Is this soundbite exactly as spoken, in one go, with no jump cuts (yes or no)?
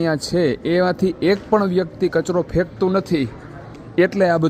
yes